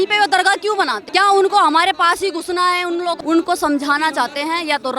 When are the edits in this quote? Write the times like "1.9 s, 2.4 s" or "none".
1.0 s, 3.2 s